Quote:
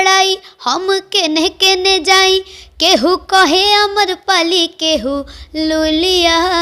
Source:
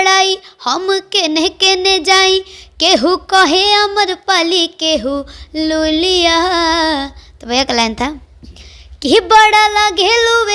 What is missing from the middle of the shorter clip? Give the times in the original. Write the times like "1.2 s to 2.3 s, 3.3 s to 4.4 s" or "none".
none